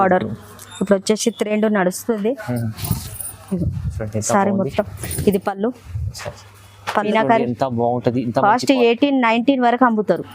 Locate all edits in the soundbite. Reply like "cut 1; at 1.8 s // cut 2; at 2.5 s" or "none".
cut 1; at 7.1 s